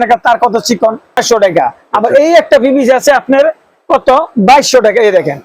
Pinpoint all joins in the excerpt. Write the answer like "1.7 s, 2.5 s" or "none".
1.2 s

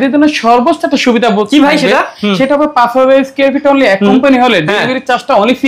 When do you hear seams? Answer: none

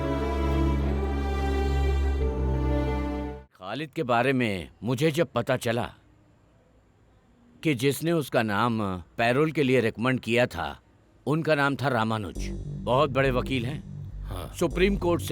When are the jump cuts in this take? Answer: 3.5 s

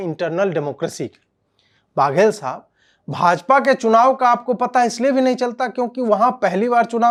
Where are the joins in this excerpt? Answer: none

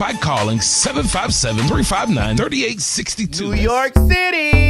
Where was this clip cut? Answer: 3.5 s

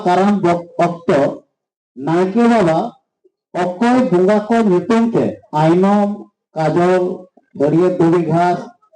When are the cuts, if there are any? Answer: 5.4 s

